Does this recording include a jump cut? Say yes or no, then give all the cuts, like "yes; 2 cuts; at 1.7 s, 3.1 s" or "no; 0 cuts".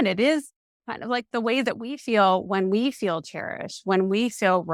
no; 0 cuts